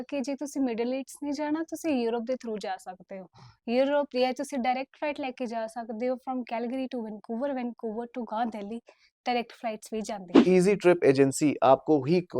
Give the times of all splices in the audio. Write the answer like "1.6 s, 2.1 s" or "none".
10.4 s